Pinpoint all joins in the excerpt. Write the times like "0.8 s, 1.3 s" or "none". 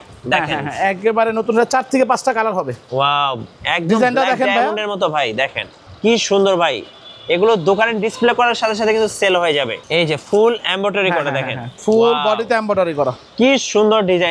9.7 s